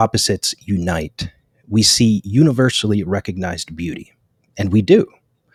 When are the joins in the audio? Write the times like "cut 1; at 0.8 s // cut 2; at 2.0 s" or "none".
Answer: none

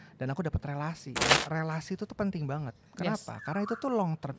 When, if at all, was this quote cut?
cut 1; at 1.4 s

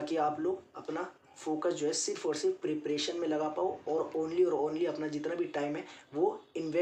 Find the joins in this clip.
none

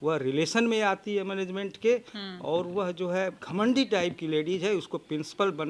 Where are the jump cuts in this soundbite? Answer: cut 1; at 3.4 s

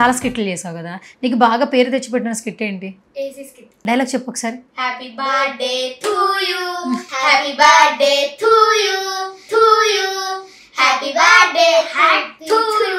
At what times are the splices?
cut 1; at 3.6 s // cut 2; at 7.1 s

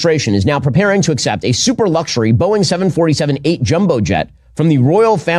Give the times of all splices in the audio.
none

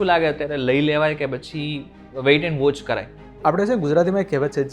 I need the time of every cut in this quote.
cut 1; at 3.4 s

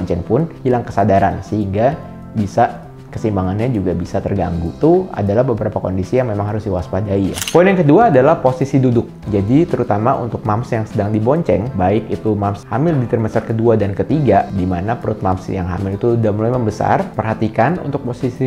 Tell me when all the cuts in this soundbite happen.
cut 1; at 7.3 s

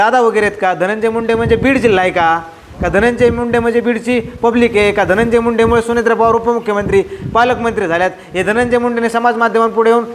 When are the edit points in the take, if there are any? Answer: none

